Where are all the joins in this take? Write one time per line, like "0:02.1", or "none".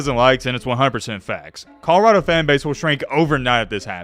none

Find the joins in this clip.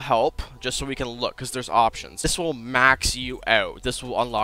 0:02.3

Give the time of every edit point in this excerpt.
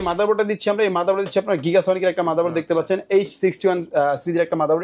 none

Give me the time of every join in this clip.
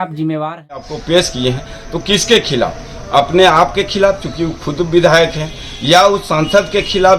0:00.9

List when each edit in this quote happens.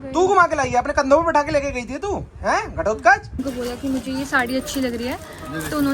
0:03.4

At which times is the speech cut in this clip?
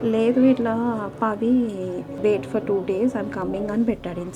0:02.1

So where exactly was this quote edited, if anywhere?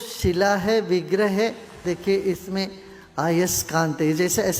0:01.8

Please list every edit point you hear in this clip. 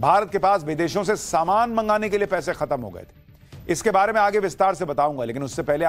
0:01.0

